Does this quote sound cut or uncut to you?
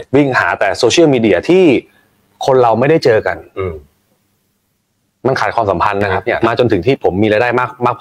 cut